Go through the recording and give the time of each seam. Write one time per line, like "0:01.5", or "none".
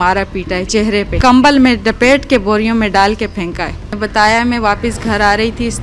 0:01.1
0:03.9